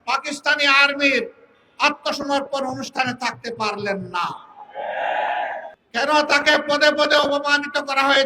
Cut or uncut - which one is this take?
cut